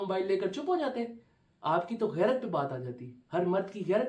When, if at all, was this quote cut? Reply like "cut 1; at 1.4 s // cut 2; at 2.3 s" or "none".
none